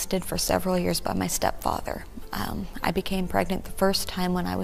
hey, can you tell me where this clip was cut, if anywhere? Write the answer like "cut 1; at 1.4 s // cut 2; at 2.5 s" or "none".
none

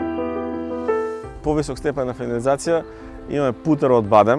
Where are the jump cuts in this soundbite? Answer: cut 1; at 1.3 s

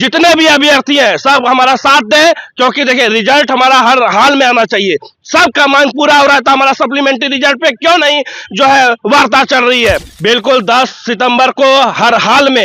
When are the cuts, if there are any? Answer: cut 1; at 10.1 s

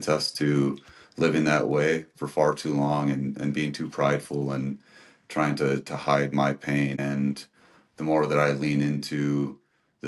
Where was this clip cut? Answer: cut 1; at 7.0 s

